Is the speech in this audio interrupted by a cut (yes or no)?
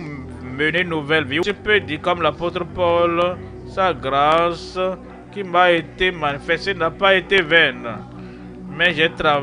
yes